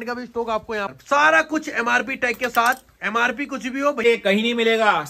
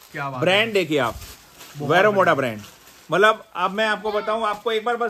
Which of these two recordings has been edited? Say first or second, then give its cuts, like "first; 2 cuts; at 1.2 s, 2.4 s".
first; 2 cuts; at 1.0 s, 4.0 s